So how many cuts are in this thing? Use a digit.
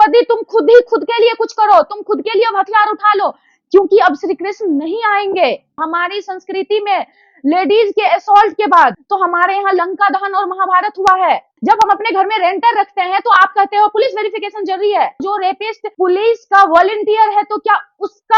2